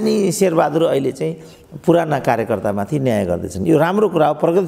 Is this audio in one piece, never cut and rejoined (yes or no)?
yes